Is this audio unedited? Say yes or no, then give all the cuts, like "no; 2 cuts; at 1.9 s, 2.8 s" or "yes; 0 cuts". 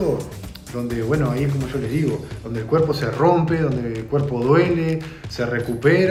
yes; 0 cuts